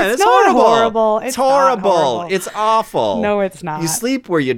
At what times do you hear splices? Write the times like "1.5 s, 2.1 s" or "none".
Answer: 3.6 s